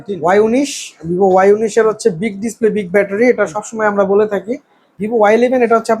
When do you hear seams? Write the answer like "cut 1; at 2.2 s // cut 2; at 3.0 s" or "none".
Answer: cut 1; at 4.8 s